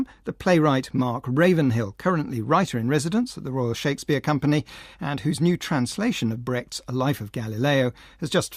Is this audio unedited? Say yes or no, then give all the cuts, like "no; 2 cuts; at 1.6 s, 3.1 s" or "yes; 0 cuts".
no; 1 cut; at 7.3 s